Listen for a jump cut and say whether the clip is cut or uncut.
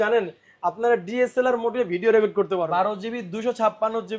cut